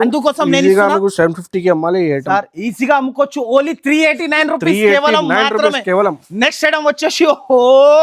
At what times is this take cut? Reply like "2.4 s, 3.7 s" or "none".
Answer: none